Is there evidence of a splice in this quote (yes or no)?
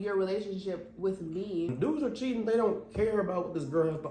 yes